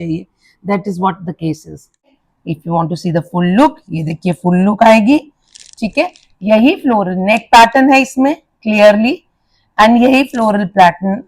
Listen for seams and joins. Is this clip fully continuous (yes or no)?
no